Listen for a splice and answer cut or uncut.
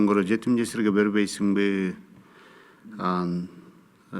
uncut